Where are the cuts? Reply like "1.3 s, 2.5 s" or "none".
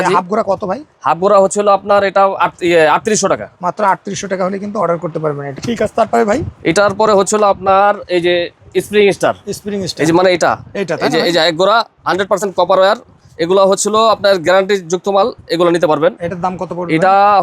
5.5 s